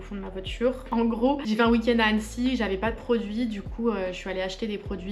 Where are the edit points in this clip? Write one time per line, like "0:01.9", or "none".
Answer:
none